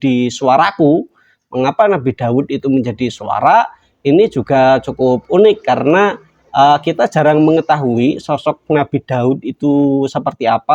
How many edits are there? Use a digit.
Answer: 0